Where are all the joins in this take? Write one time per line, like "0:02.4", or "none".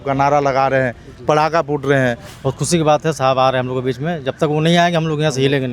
0:02.3